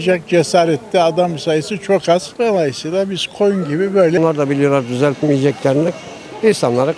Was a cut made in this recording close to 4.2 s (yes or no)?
yes